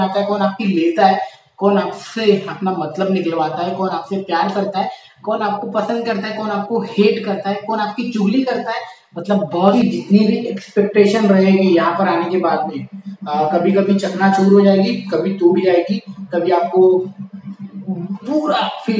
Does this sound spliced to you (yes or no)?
yes